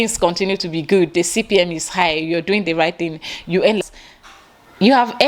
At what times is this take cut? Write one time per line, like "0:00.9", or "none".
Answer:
0:03.8